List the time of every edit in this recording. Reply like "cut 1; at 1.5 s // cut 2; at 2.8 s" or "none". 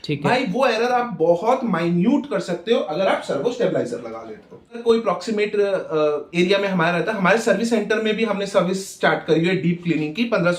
cut 1; at 4.8 s